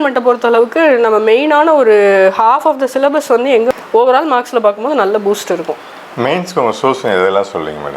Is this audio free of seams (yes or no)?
no